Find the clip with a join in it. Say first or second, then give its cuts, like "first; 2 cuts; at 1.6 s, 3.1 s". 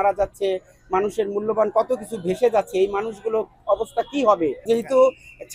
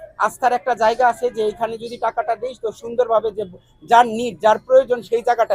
first; 1 cut; at 4.6 s